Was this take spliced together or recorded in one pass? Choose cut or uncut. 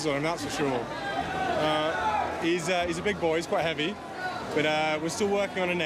uncut